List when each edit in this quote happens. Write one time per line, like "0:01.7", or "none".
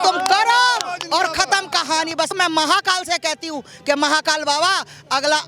0:02.3